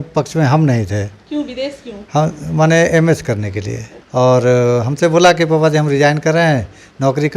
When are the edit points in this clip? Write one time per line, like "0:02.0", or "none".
0:04.1